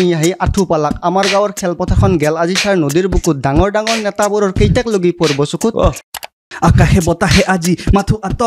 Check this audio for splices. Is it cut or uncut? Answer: cut